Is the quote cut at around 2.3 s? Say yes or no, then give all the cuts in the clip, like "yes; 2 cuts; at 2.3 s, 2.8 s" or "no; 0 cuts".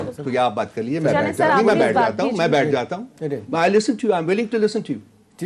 no; 0 cuts